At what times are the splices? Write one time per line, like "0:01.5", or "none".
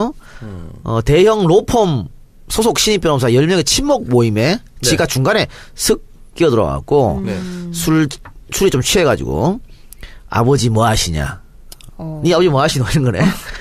0:05.6